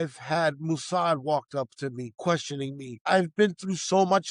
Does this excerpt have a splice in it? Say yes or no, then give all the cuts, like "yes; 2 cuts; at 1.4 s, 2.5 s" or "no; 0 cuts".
yes; 1 cut; at 2.2 s